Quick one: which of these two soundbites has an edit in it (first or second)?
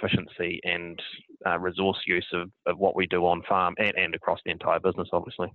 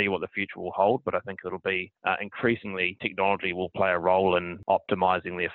second